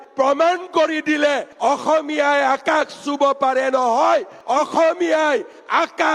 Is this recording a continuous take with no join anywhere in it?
yes; 0 cuts

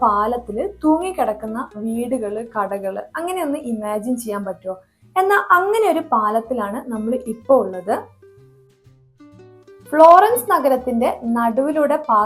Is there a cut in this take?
no; 0 cuts

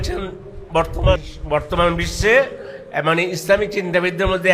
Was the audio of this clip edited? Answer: yes; 1 cut; at 1.3 s

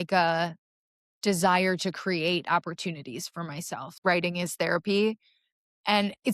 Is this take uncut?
no; 1 cut; at 3.9 s

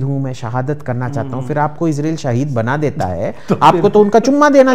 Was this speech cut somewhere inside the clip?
no; 0 cuts

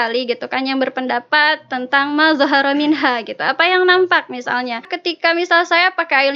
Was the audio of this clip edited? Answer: yes; 1 cut; at 5.0 s

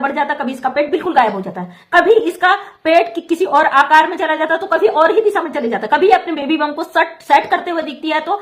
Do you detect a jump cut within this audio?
no; 0 cuts

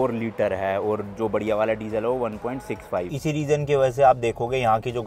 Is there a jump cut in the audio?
yes; 1 cut; at 3.1 s

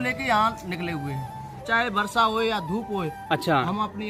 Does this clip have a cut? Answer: yes; 1 cut; at 1.6 s

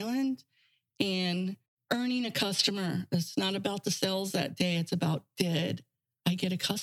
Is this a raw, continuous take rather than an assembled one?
no; 1 cut; at 1.7 s

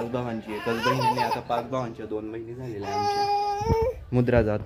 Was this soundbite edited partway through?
no; 0 cuts

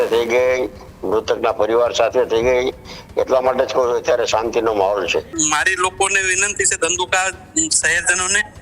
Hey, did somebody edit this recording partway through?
yes; 1 cut; at 5.3 s

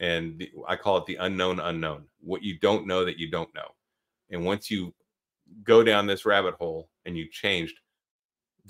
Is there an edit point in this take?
yes; 1 cut; at 2.1 s

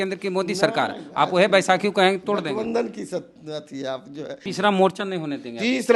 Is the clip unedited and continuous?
no; 1 cut; at 4.4 s

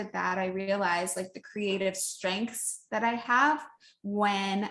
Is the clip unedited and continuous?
yes; 0 cuts

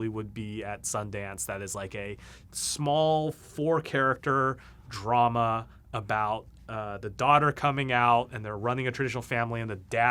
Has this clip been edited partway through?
no; 0 cuts

